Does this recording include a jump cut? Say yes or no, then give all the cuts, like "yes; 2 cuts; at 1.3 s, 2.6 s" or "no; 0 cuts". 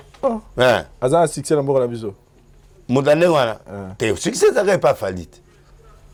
no; 0 cuts